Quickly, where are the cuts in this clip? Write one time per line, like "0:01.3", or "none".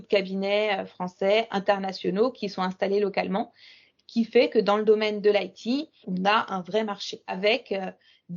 0:06.0
0:07.4